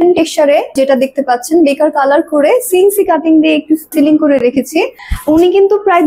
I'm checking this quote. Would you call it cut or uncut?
cut